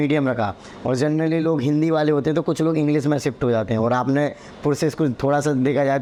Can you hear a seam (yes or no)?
no